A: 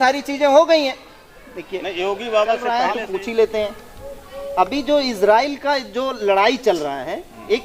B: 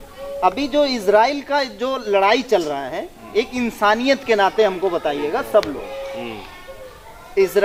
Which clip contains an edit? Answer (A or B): A